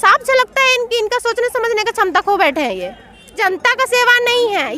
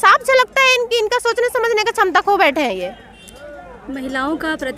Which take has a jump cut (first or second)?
first